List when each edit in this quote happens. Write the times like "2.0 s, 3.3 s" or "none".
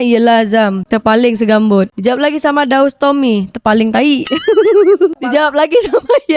none

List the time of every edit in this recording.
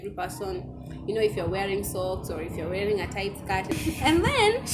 3.7 s

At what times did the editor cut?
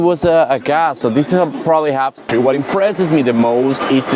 2.2 s

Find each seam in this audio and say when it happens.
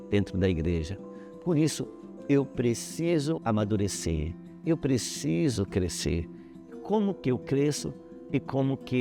3.4 s

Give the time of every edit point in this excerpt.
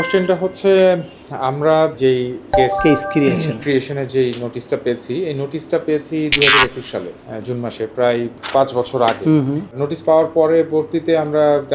2.5 s, 9.7 s

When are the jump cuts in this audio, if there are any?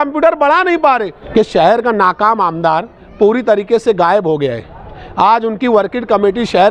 1.2 s

